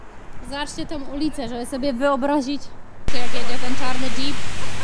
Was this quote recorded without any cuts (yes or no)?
no